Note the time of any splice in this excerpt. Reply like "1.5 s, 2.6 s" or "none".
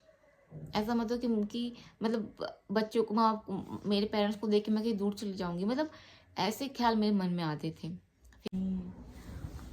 8.4 s